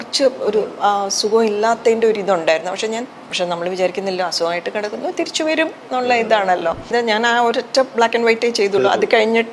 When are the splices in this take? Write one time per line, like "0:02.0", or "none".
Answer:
0:03.2
0:06.9